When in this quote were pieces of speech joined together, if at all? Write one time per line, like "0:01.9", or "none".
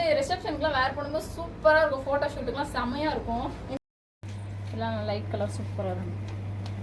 0:03.8